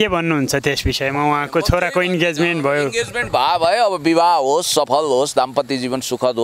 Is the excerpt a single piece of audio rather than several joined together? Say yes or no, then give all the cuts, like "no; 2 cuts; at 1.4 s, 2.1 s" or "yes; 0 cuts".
yes; 0 cuts